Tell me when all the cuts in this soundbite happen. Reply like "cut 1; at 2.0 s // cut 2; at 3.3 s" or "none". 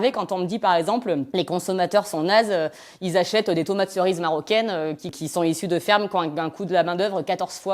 cut 1; at 1.3 s